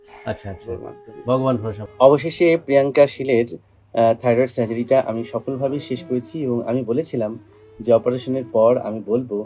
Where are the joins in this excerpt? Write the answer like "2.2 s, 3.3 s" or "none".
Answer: 1.8 s